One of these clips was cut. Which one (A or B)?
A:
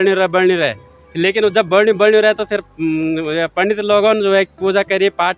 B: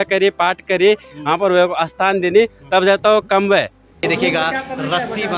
B